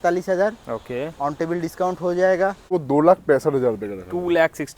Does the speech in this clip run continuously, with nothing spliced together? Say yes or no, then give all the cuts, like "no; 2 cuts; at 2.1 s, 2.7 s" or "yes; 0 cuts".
no; 1 cut; at 2.7 s